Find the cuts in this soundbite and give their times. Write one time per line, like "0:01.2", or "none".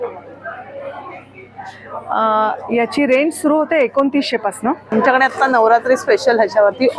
0:04.9

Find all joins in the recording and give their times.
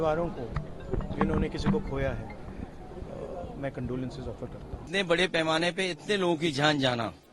0:04.9

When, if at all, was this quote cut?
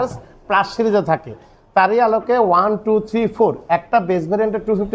none

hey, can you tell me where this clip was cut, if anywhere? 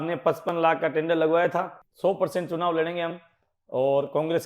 0:01.8

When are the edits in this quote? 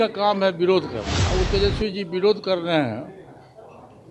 0:01.1

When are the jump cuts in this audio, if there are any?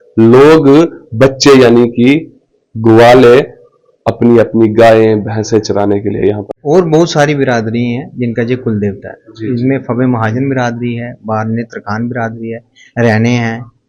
0:06.4

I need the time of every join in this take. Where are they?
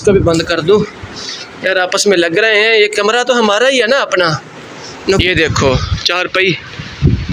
0:05.2

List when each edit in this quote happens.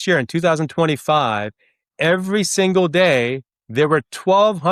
none

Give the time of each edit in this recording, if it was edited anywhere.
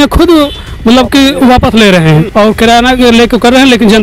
0:02.3

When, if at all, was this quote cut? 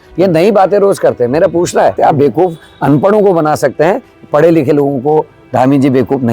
0:01.9

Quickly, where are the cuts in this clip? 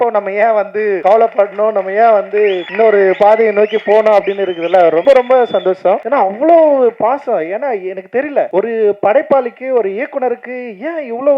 0:01.0
0:02.6
0:05.0
0:06.0
0:08.5

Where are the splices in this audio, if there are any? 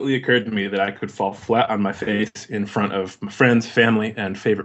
none

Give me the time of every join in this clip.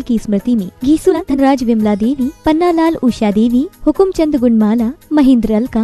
0:01.1

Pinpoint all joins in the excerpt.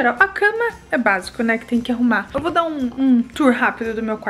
none

